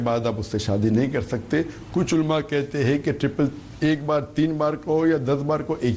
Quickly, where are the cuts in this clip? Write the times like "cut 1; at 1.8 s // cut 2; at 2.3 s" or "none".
cut 1; at 4.0 s